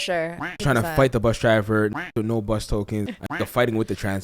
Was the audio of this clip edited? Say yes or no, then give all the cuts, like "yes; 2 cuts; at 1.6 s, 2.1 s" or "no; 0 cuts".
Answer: yes; 1 cut; at 3.1 s